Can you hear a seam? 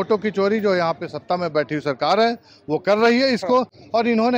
no; 0 cuts

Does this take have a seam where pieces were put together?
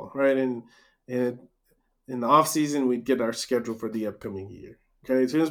no; 0 cuts

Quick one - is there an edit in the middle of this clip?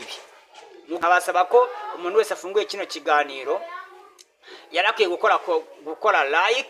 yes; 1 cut; at 1.0 s

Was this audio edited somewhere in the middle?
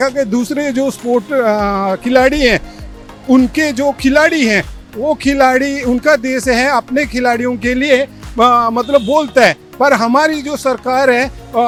no; 0 cuts

